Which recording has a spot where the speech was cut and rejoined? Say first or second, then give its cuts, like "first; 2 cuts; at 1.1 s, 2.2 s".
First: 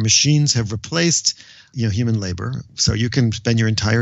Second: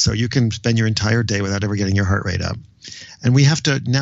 first; 1 cut; at 1.7 s